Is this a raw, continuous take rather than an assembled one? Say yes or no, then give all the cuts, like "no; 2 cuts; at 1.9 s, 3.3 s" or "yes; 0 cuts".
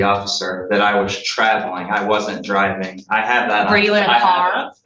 yes; 0 cuts